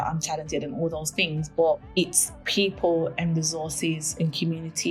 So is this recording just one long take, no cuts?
no; 1 cut; at 1.9 s

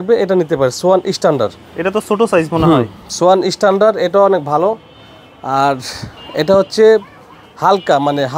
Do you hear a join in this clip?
no; 0 cuts

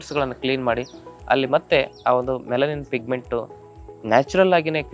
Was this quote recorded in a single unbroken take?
yes; 0 cuts

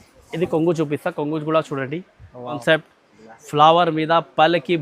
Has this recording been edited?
yes; 1 cut; at 2.6 s

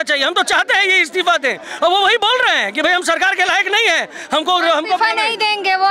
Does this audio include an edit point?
no; 0 cuts

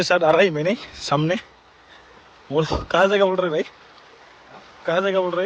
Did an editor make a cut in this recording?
no; 0 cuts

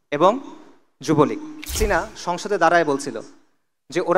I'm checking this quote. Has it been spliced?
yes; 1 cut; at 1.8 s

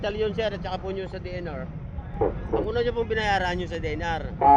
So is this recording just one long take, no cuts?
yes; 0 cuts

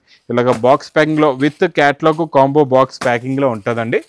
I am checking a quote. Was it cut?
no; 0 cuts

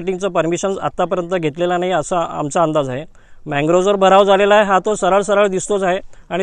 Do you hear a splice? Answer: no; 0 cuts

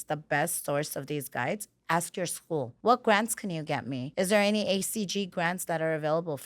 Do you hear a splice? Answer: yes; 2 cuts; at 2.7 s, 4.0 s

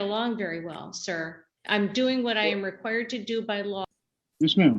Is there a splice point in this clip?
yes; 1 cut; at 3.9 s

